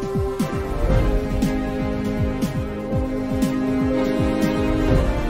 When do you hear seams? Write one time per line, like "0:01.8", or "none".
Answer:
none